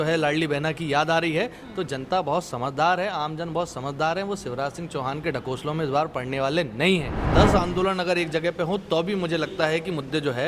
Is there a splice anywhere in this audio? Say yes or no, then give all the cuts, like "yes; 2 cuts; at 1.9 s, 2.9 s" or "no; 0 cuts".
yes; 1 cut; at 7.2 s